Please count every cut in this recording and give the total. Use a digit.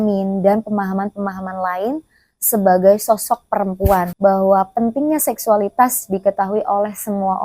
1